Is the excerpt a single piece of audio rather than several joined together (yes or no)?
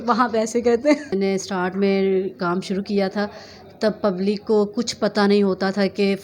no